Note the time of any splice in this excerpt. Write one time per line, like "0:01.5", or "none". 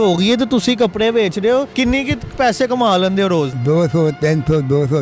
0:01.7
0:03.6